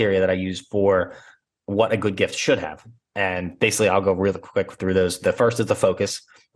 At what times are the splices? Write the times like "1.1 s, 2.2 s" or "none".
none